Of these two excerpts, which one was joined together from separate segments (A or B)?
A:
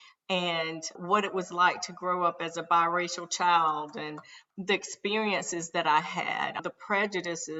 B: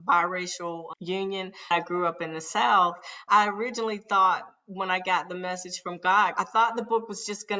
B